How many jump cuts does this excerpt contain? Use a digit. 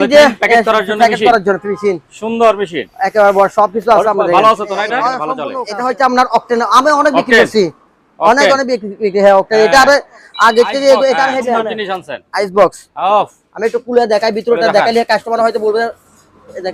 2